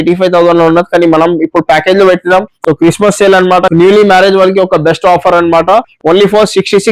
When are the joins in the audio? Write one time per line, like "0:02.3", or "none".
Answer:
0:03.7